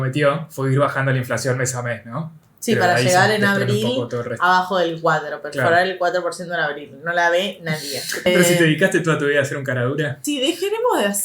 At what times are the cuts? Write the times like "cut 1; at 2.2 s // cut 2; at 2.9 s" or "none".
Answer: cut 1; at 8.3 s // cut 2; at 10.2 s